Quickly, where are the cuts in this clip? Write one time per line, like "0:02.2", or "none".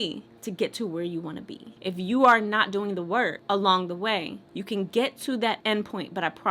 0:01.6

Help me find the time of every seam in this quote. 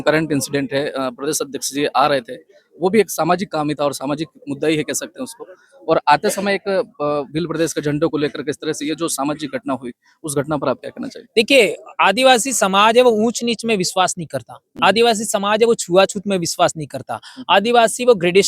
none

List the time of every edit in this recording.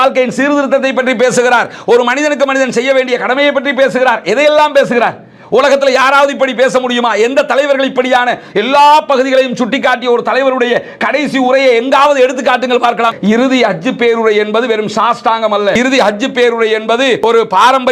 0:13.1

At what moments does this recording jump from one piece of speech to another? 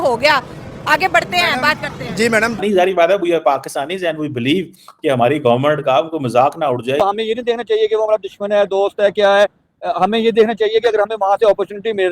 0:02.6
0:07.0

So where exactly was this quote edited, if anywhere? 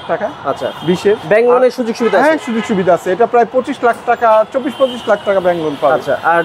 none

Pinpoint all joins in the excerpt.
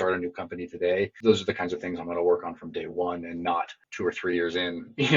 0:01.2
0:03.8

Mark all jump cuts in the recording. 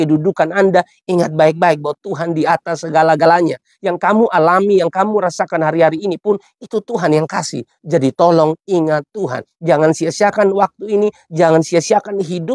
none

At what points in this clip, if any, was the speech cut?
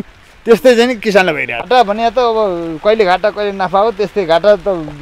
0:01.5

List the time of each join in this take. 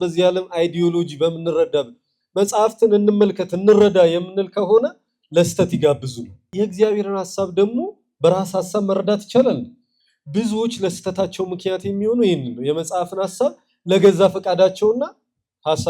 0:06.5

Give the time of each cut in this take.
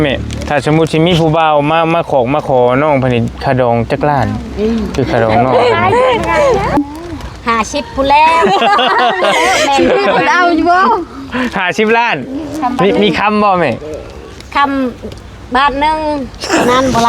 0:06.8

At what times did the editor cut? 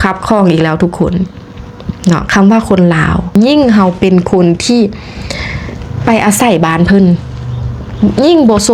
0:03.3

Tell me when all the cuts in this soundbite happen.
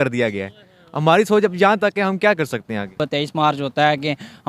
0:03.0

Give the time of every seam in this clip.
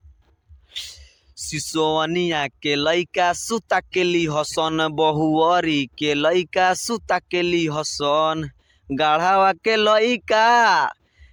none

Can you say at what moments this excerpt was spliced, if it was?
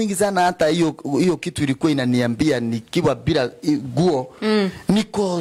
none

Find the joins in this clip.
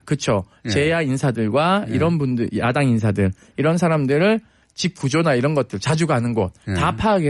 0:02.8

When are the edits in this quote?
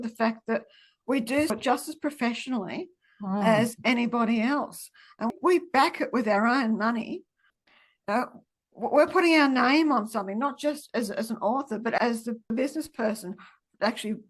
0:01.6
0:05.3
0:07.6
0:11.9

